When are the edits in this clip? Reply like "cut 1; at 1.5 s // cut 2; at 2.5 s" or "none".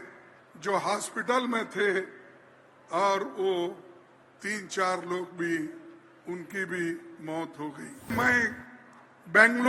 cut 1; at 8.1 s